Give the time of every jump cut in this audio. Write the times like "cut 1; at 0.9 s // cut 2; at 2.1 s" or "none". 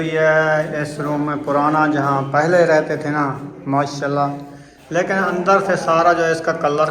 none